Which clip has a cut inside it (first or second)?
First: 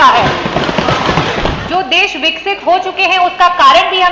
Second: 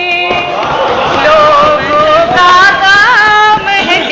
first